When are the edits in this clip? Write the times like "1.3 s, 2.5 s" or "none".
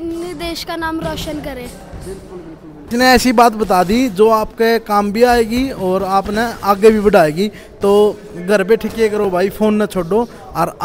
none